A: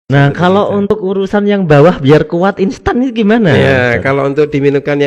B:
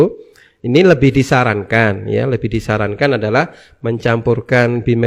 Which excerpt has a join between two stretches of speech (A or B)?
A